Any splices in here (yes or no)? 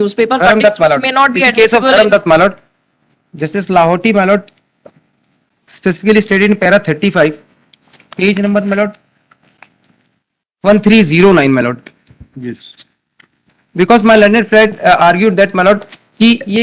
no